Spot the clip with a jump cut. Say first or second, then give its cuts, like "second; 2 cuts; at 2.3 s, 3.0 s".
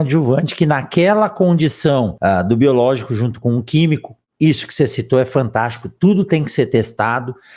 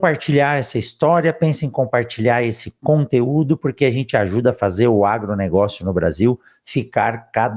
first; 1 cut; at 2.1 s